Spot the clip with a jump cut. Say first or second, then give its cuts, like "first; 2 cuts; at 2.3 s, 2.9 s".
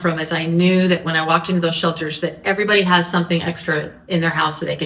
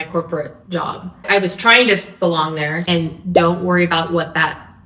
second; 2 cuts; at 1.2 s, 2.8 s